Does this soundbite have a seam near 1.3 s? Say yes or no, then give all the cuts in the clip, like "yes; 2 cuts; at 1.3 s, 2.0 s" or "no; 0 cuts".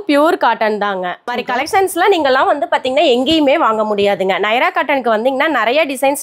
yes; 1 cut; at 1.3 s